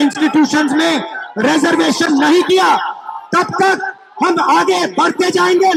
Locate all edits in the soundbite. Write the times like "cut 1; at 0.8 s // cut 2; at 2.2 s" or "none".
none